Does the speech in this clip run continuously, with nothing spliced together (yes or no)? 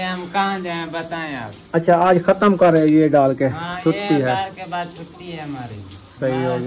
yes